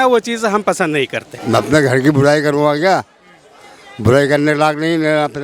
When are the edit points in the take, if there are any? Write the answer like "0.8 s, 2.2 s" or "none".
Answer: 1.3 s

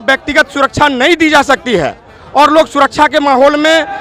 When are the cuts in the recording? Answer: none

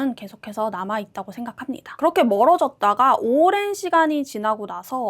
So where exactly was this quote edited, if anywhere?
1.9 s

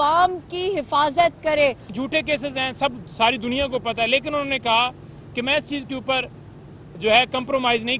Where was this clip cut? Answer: 1.9 s

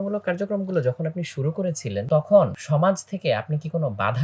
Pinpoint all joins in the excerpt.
2.0 s, 2.6 s

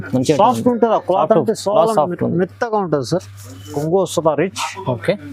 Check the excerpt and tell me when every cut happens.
3.7 s

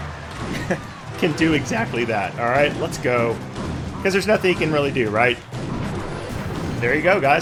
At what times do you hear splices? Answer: none

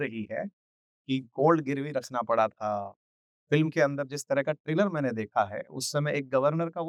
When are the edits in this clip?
none

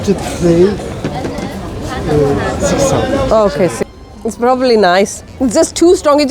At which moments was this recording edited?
3.9 s

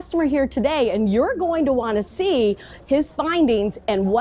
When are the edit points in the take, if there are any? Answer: none

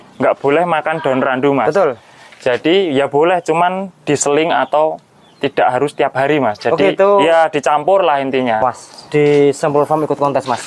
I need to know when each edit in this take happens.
8.6 s

